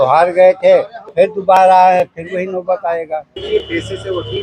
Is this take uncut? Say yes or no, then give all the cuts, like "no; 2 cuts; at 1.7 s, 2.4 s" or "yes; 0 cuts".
no; 1 cut; at 3.4 s